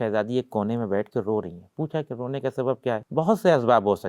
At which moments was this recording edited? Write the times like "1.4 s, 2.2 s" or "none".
3.1 s